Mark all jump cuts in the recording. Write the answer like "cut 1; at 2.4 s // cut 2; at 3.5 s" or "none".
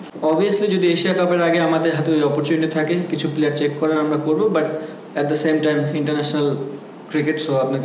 none